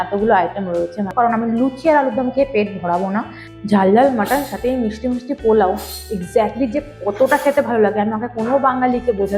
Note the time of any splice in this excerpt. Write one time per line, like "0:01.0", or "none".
0:01.1
0:03.4